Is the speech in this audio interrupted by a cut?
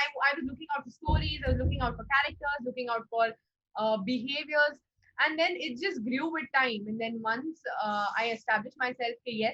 no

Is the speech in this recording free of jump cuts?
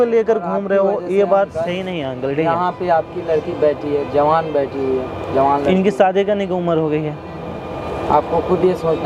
yes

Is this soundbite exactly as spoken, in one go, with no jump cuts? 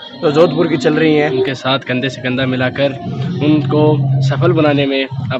no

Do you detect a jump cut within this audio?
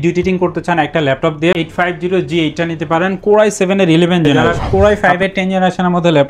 yes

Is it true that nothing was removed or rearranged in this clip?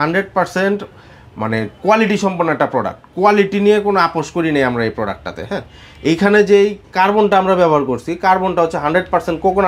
yes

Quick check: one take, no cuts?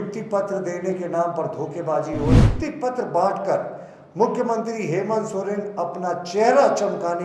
no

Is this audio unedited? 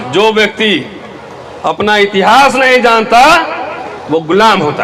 yes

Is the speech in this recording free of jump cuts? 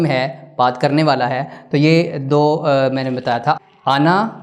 yes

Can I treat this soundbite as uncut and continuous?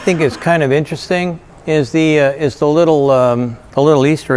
yes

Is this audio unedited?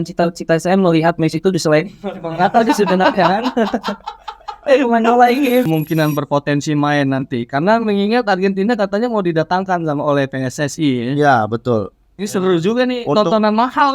no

